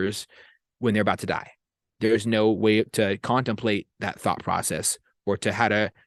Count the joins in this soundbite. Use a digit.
0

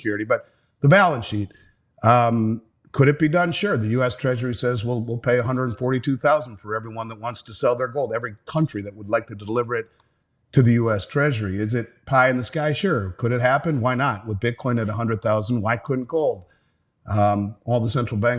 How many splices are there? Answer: 0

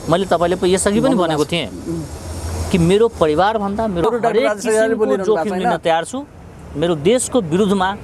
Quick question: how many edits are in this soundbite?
1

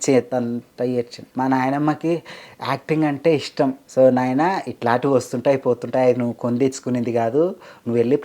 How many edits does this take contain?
2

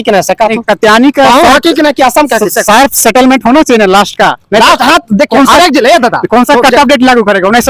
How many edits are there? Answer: 0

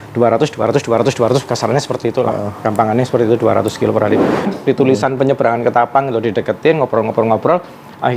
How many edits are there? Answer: 1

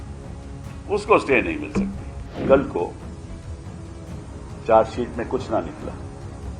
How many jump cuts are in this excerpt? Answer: 4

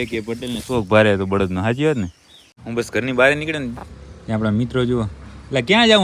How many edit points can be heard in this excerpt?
1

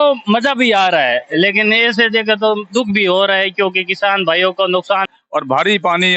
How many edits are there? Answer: 1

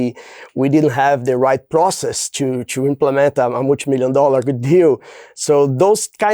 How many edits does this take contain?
0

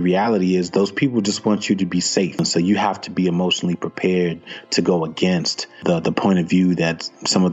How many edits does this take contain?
2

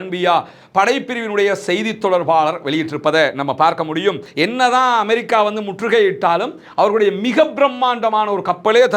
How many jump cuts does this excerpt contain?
1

